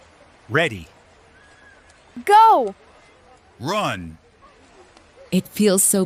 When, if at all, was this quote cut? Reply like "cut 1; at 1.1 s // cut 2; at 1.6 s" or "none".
none